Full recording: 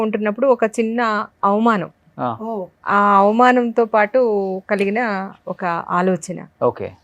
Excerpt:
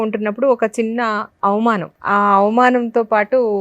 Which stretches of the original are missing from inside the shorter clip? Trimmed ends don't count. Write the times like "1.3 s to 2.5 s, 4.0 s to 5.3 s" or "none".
1.9 s to 2.8 s